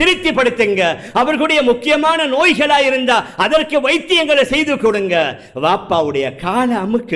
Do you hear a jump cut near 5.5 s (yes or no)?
no